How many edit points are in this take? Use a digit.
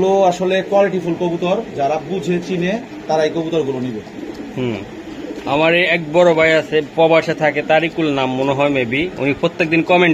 0